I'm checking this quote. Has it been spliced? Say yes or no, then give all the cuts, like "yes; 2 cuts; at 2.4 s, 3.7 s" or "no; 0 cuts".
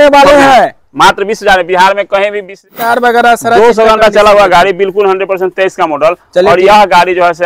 yes; 1 cut; at 2.7 s